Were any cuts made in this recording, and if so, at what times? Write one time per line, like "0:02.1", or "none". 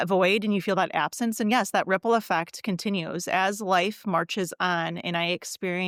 none